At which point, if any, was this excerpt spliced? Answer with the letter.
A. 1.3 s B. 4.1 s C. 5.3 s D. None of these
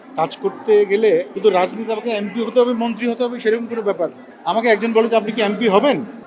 A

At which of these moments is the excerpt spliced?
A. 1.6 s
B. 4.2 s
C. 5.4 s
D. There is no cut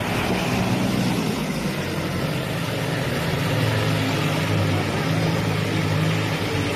D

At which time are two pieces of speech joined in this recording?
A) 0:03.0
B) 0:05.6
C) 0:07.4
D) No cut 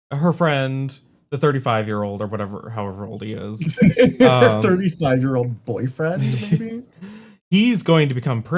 D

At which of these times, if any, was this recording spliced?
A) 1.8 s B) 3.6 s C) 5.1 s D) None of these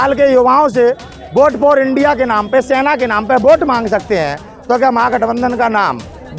D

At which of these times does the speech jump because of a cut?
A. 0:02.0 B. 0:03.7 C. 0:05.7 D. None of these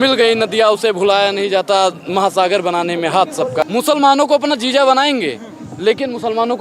B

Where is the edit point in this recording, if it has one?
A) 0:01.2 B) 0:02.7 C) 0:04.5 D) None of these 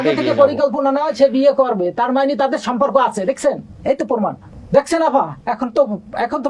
C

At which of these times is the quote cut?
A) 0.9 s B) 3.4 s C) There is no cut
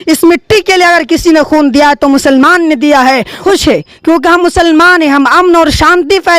B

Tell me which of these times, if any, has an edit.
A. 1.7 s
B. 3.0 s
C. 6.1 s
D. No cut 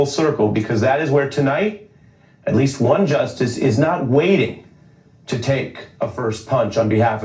C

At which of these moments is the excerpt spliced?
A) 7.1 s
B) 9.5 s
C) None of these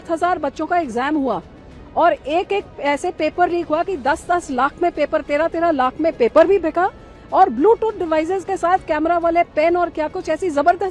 C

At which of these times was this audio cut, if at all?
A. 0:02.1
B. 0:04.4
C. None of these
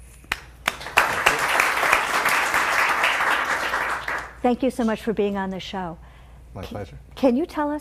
A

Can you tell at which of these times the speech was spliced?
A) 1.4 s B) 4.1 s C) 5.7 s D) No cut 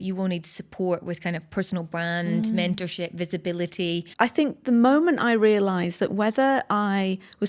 B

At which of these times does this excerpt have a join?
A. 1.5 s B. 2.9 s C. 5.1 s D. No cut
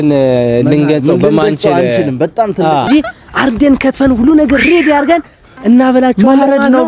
B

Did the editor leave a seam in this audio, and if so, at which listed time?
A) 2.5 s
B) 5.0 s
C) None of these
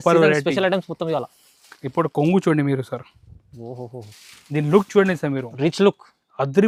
C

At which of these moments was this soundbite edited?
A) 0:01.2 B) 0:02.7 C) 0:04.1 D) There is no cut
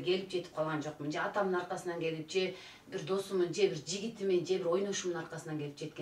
D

